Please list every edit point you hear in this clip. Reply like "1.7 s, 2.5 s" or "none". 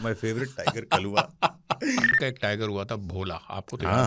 2.2 s